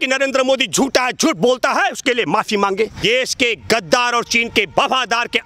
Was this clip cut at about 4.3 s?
no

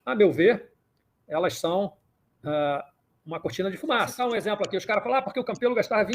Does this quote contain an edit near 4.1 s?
yes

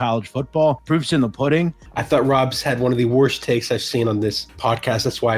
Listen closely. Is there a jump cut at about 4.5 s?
yes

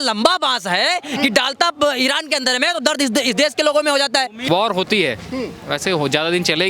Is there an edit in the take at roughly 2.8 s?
no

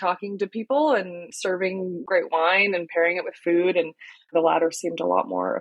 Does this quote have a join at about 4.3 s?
yes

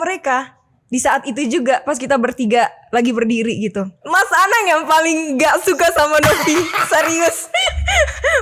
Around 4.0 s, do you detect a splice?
yes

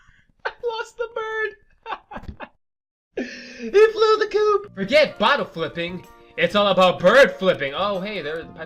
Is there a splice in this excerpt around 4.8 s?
yes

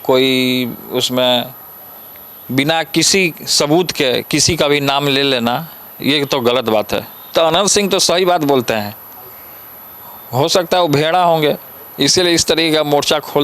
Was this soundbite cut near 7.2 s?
yes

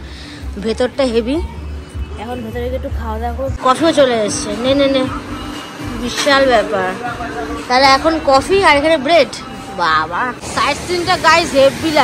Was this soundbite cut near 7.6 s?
no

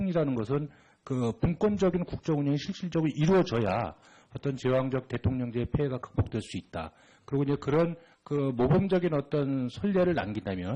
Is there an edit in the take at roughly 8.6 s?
no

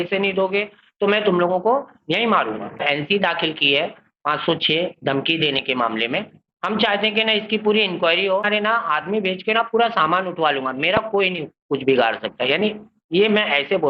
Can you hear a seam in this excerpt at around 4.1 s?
no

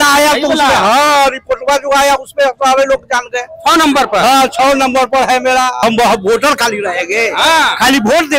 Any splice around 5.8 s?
yes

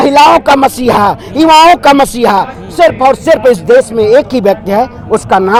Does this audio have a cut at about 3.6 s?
no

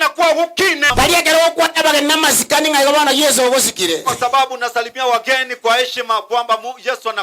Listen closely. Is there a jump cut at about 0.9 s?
yes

